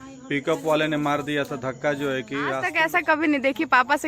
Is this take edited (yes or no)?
yes